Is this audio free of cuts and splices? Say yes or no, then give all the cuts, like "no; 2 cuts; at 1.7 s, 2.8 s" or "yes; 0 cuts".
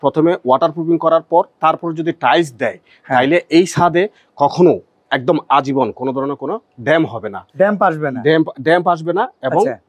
yes; 0 cuts